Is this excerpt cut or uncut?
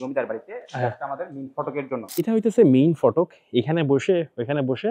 cut